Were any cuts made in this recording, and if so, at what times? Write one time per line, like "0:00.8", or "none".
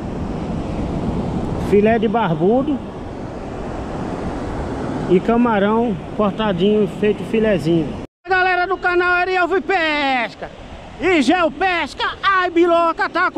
0:08.1